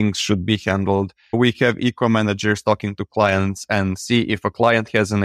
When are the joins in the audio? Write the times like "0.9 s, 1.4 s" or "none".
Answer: 1.4 s